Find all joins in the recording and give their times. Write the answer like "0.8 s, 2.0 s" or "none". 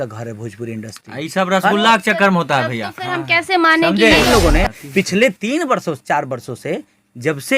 4.3 s